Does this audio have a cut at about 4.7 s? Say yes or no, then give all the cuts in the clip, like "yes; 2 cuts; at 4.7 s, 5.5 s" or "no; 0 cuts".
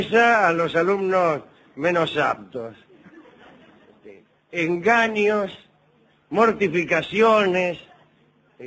yes; 1 cut; at 4.7 s